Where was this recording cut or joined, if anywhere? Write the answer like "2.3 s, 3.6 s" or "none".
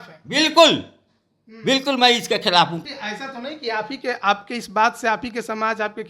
2.8 s